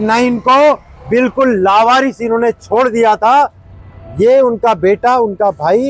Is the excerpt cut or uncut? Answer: uncut